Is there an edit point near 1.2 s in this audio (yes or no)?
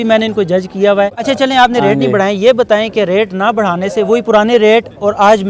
yes